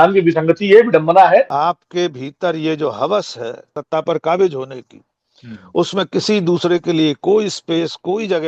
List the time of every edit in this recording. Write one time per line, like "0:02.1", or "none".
0:01.5
0:03.7